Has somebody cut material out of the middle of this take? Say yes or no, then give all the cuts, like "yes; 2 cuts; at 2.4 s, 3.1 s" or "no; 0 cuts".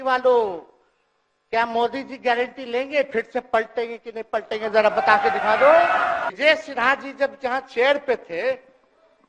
yes; 1 cut; at 6.3 s